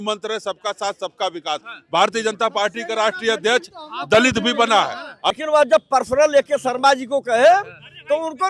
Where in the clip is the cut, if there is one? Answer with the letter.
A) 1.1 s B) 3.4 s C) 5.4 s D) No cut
C